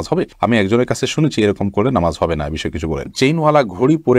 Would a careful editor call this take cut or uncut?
cut